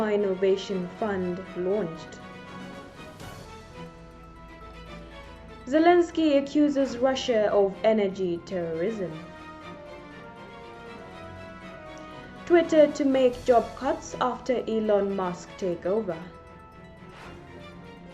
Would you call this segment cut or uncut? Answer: cut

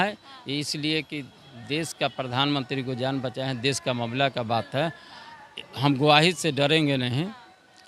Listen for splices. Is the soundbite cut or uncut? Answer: uncut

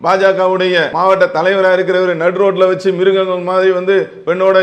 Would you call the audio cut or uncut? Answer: cut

